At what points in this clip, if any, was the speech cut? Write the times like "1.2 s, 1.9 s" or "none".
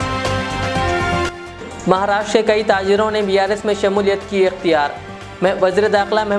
1.2 s